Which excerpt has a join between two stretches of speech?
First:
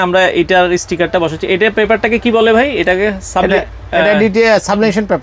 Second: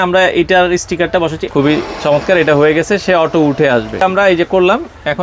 second; 2 cuts; at 1.5 s, 4.0 s

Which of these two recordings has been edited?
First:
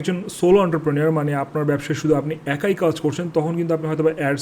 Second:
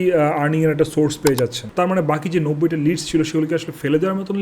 second; 1 cut; at 1.6 s

